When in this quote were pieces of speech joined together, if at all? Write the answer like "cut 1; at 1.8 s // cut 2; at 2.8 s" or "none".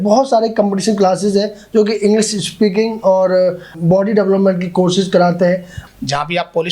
cut 1; at 5.7 s